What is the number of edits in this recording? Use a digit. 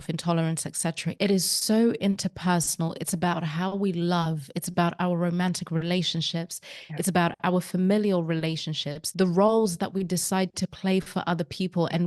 1